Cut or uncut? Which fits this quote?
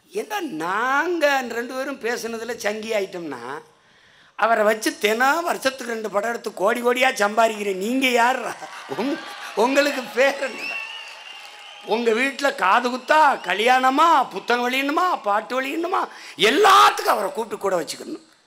uncut